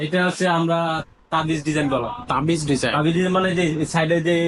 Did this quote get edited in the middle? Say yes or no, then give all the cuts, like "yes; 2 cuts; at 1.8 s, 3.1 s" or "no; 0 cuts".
no; 0 cuts